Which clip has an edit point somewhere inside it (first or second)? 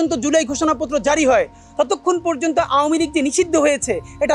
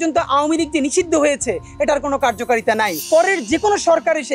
second